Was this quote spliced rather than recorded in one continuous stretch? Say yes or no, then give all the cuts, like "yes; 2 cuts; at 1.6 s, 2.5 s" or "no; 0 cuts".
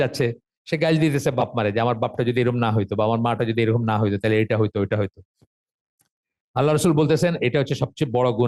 no; 0 cuts